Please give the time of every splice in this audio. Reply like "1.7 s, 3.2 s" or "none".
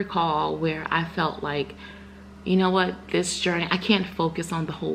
none